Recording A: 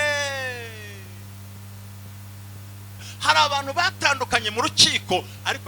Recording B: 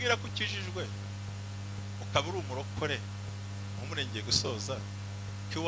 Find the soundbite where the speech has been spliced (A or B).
A